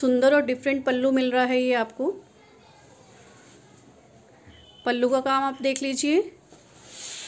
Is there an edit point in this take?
no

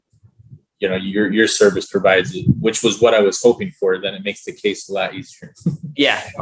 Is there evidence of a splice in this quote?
no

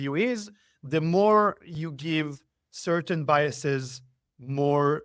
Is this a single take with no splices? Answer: yes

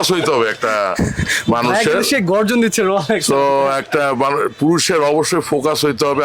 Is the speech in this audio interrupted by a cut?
no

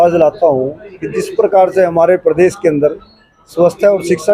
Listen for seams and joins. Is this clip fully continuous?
yes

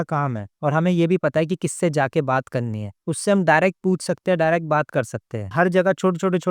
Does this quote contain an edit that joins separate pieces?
yes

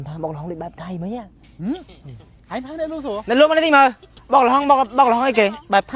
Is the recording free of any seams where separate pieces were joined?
no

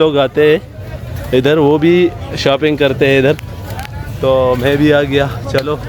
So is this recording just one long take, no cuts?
yes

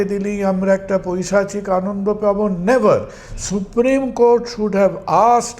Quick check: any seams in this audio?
no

